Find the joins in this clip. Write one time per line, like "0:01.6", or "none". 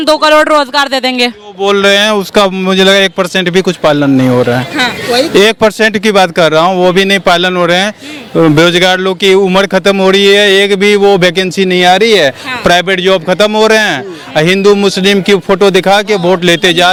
none